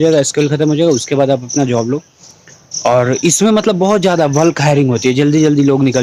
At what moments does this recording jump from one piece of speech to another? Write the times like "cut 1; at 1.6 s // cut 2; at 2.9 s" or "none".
none